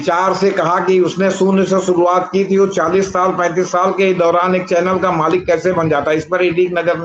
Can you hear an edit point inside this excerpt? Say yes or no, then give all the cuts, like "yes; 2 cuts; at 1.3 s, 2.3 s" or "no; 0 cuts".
no; 0 cuts